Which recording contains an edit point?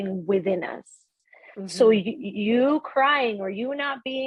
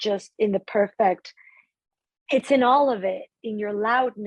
second; 1 cut; at 1.5 s

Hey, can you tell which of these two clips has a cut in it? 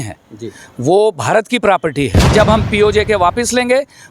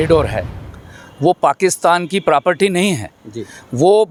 first; 1 cut; at 2.3 s

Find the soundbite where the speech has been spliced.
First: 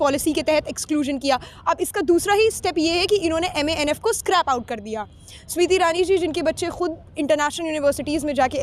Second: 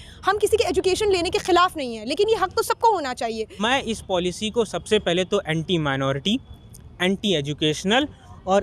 second; 1 cut; at 3.6 s

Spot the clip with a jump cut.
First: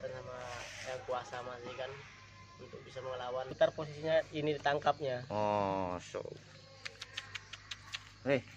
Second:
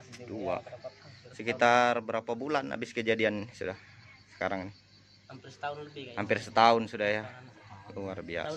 first; 1 cut; at 3.5 s

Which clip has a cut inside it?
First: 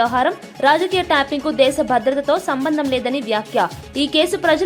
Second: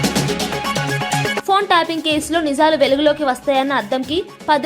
second; 1 cut; at 1.4 s

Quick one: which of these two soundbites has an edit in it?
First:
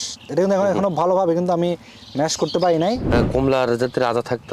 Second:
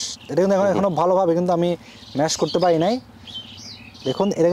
first; 1 cut; at 3.0 s

